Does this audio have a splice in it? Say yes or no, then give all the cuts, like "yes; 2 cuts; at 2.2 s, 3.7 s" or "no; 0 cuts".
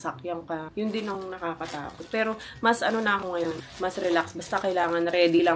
no; 0 cuts